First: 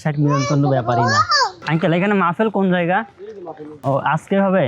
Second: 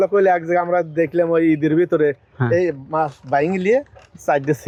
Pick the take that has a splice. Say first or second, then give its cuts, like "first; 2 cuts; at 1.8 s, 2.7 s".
first; 1 cut; at 1.6 s